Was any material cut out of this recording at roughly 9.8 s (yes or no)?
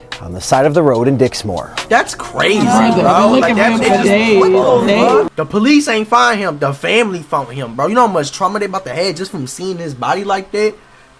no